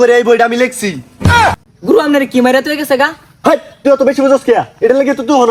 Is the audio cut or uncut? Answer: uncut